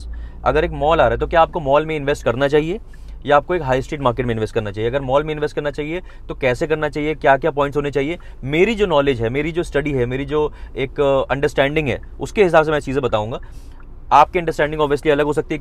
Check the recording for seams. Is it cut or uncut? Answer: uncut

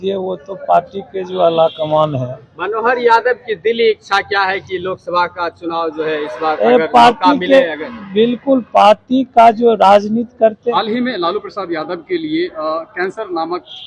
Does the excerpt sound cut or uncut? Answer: cut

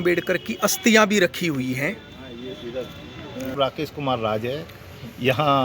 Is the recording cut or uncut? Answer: cut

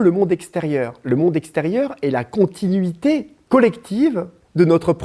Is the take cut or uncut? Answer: cut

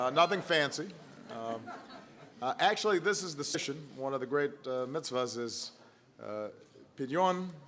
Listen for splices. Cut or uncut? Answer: uncut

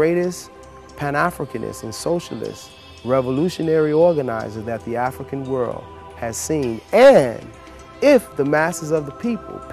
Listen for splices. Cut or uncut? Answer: uncut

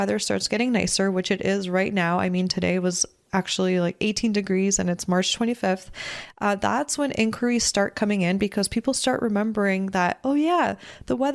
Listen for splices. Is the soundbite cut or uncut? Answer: uncut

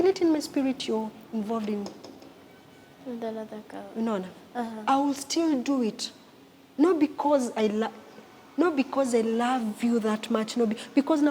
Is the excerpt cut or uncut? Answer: uncut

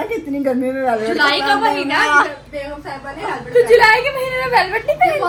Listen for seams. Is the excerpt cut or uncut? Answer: uncut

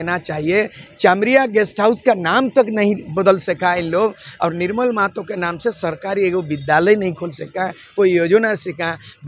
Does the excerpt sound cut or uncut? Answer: uncut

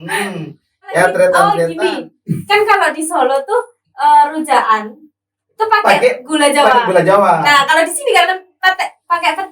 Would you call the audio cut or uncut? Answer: cut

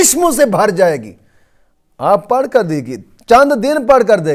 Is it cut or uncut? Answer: uncut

